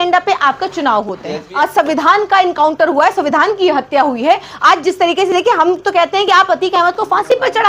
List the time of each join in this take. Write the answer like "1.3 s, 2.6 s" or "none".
1.4 s